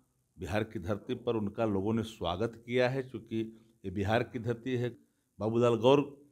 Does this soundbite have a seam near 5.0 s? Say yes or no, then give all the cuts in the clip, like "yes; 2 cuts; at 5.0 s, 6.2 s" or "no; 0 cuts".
yes; 1 cut; at 5.0 s